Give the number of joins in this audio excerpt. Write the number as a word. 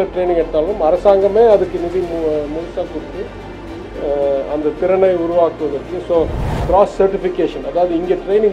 one